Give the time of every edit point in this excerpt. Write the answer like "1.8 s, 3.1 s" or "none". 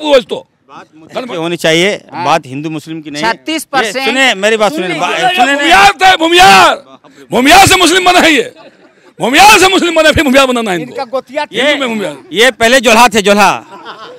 none

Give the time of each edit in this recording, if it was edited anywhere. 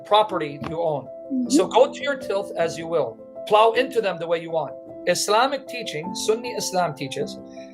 3.3 s, 4.9 s

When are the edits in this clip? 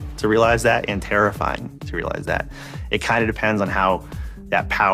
1.8 s

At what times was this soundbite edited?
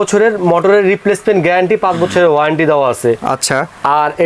none

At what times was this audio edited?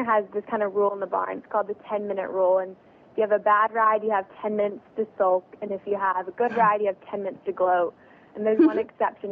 none

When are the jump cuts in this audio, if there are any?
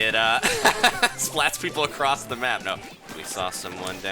2.9 s

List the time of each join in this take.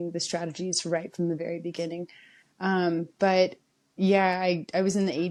none

